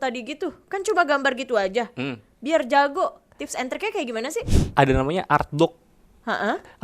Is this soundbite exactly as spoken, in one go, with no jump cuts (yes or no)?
no